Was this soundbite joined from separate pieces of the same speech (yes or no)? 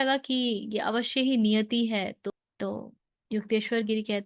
yes